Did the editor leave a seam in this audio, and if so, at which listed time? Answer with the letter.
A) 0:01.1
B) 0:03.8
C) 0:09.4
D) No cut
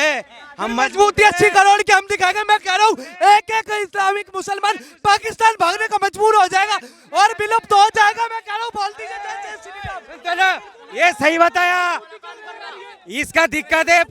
D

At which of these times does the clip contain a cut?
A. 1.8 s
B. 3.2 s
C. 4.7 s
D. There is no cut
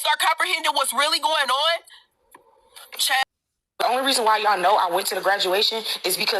B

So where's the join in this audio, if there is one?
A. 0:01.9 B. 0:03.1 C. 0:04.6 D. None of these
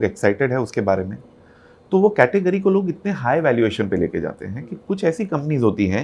D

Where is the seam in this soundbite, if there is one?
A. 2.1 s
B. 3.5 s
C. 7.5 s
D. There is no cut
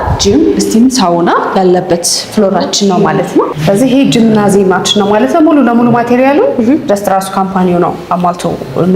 B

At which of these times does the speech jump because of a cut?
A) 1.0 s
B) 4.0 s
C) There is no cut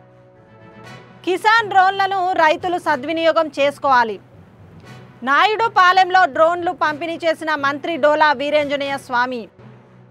A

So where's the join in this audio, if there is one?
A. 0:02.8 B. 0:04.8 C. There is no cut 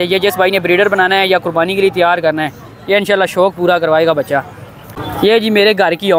B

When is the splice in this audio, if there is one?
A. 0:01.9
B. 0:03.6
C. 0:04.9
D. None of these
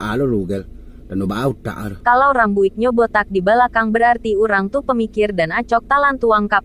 A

